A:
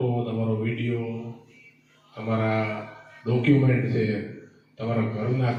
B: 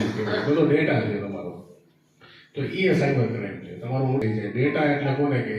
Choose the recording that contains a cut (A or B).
B